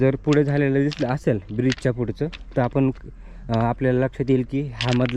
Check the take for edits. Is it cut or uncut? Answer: uncut